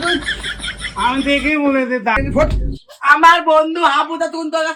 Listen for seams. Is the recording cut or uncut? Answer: cut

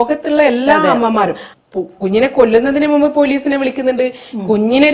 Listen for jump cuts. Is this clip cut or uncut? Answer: cut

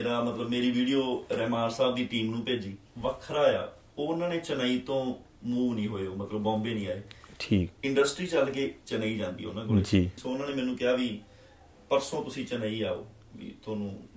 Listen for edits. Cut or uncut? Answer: cut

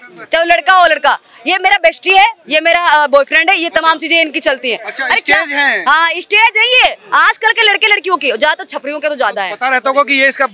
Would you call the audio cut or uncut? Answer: uncut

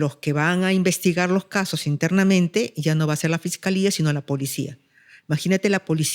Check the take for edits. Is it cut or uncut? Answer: uncut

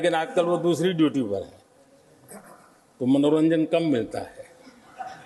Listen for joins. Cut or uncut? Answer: uncut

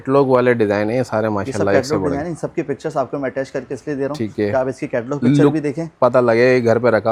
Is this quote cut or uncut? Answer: uncut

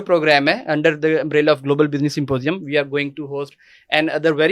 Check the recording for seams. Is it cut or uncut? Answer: uncut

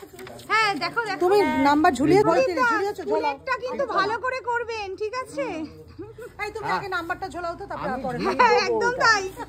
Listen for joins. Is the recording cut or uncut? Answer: cut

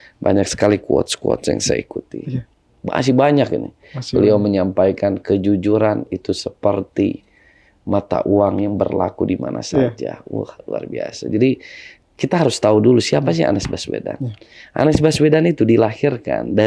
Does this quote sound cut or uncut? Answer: uncut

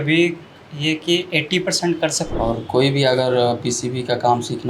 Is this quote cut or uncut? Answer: cut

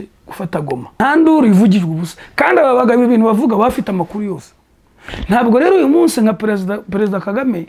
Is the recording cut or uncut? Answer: cut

